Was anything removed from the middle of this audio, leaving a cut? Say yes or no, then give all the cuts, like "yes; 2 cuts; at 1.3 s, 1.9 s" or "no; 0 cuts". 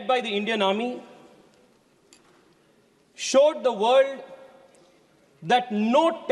no; 0 cuts